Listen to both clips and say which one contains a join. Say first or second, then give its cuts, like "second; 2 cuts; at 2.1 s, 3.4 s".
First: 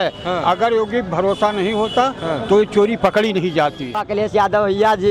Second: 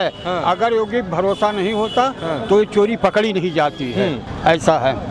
first; 1 cut; at 4.0 s